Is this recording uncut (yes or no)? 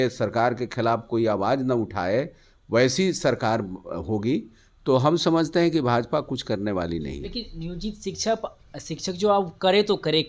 yes